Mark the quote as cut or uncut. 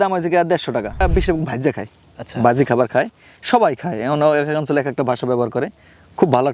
cut